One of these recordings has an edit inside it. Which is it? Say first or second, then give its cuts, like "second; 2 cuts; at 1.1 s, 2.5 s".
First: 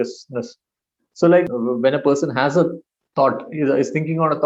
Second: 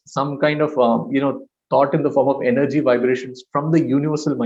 first; 1 cut; at 1.5 s